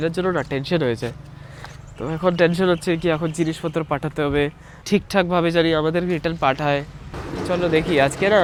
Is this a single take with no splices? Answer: yes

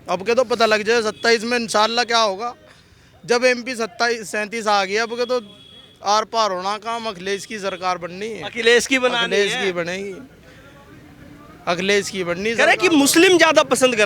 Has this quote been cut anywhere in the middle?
no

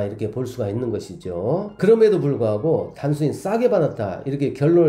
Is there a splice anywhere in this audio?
no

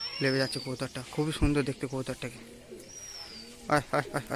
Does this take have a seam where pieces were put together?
no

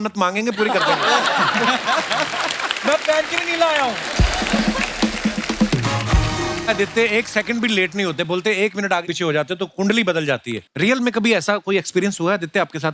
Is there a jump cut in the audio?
no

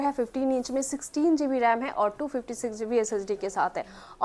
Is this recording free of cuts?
yes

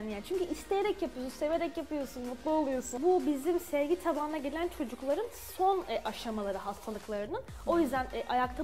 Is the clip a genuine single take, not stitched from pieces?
no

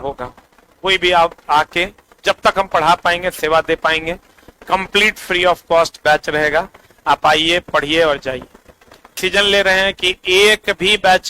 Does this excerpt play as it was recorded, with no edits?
no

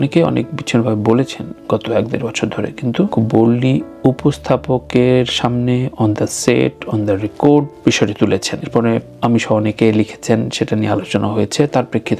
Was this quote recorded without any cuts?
yes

